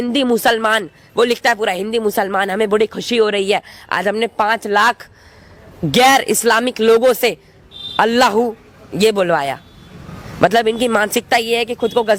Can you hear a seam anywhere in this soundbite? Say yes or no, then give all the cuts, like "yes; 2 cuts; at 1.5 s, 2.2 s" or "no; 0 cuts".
no; 0 cuts